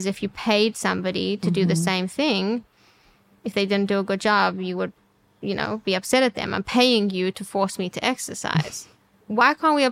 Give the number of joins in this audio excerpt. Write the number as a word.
zero